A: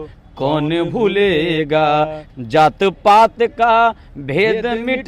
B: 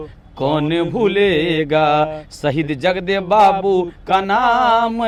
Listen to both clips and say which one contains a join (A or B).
A